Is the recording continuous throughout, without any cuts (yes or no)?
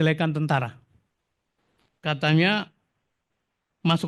yes